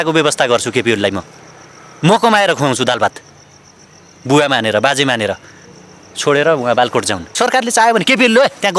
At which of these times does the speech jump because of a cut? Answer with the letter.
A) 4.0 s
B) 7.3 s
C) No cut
B